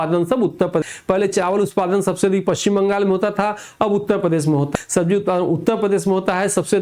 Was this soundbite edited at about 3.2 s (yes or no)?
no